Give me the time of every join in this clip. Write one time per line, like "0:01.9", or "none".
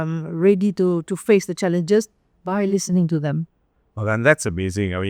none